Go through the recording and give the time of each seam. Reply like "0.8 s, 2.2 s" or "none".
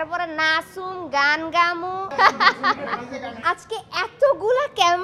2.1 s, 3.4 s